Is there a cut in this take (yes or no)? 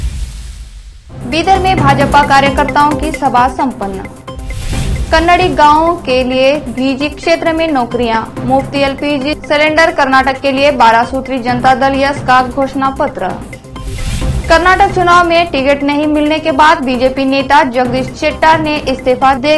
yes